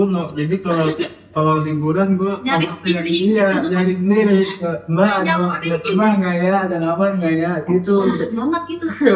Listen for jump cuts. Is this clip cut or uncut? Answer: uncut